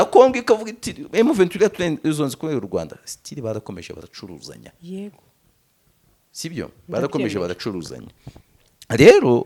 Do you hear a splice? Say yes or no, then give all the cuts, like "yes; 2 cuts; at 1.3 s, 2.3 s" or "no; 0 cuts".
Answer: no; 0 cuts